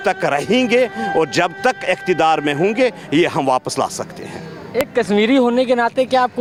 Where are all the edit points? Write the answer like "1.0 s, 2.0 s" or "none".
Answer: none